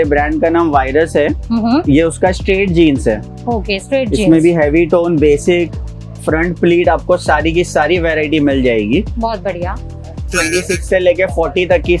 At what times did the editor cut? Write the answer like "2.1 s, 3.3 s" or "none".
none